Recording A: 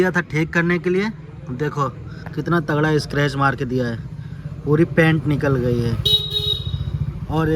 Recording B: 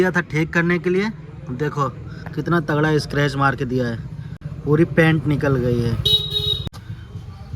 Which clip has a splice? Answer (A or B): B